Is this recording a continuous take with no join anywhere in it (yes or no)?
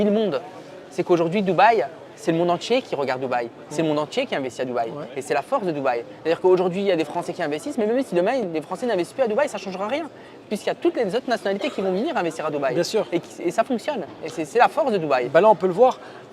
yes